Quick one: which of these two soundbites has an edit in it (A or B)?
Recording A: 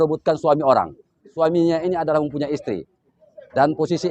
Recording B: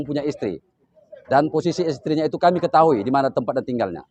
A